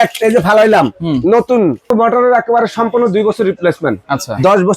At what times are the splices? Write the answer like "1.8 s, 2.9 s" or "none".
1.9 s